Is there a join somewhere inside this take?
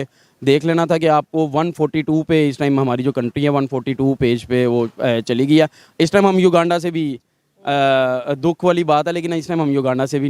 no; 0 cuts

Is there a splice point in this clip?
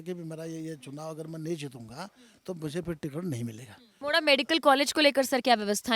yes; 1 cut; at 3.8 s

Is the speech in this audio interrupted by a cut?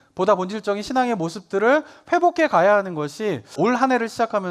yes; 1 cut; at 3.5 s

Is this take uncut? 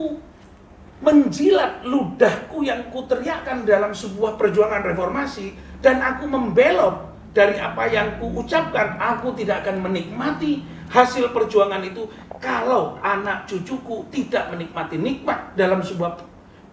yes; 0 cuts

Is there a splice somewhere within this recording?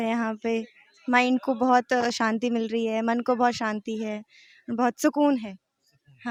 no; 0 cuts

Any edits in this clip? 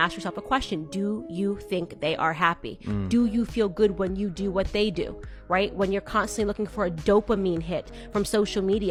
no; 0 cuts

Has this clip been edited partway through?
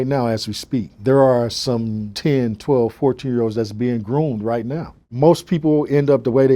yes; 2 cuts; at 0.9 s, 2.0 s

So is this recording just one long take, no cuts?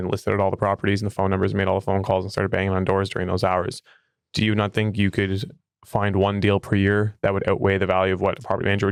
yes; 0 cuts

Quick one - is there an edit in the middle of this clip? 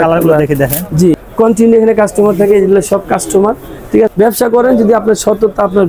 yes; 2 cuts; at 1.1 s, 4.1 s

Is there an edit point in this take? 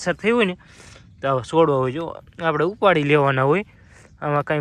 no; 0 cuts

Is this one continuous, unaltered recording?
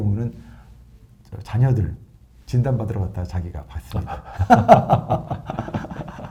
yes; 0 cuts

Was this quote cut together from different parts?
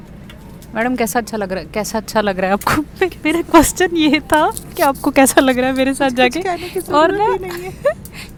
no; 0 cuts

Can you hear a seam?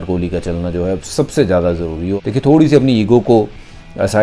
yes; 1 cut; at 2.2 s

